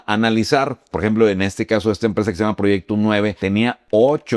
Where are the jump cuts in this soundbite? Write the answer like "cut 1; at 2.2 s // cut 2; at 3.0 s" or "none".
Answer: cut 1; at 0.9 s // cut 2; at 3.4 s